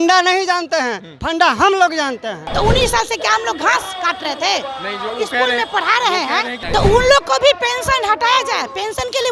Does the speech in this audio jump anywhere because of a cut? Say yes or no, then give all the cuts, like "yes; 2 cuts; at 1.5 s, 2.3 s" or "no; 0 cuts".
yes; 2 cuts; at 2.4 s, 6.6 s